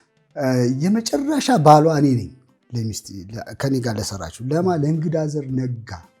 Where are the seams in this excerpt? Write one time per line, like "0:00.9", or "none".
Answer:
none